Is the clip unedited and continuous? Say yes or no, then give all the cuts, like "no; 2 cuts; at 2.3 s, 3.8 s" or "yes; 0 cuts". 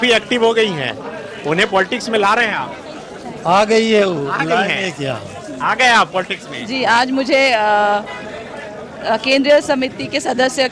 yes; 0 cuts